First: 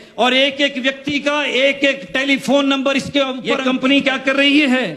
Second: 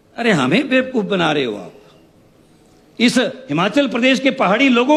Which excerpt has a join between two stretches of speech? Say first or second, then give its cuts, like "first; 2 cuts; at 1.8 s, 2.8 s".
first; 1 cut; at 3.5 s